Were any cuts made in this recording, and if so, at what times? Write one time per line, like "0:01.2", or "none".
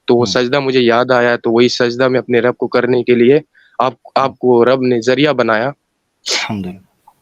none